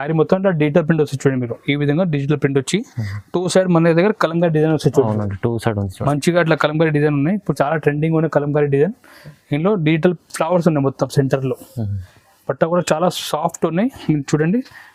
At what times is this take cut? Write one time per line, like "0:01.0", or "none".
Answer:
none